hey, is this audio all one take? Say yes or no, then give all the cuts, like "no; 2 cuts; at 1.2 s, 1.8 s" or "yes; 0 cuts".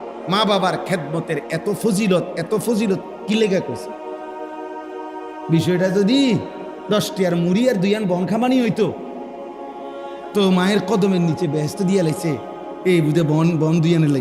no; 2 cuts; at 9.0 s, 10.3 s